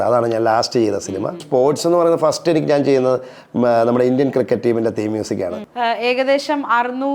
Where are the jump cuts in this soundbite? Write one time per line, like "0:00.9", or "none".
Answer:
0:01.4
0:05.6